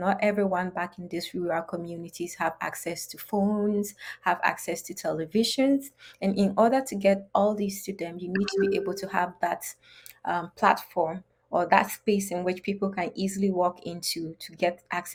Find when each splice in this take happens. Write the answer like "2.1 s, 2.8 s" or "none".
none